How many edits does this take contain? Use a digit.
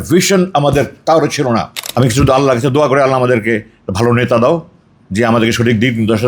1